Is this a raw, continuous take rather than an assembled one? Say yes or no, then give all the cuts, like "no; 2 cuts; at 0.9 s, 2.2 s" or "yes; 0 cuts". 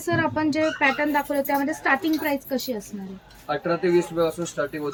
yes; 0 cuts